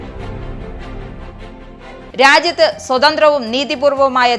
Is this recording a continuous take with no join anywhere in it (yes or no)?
yes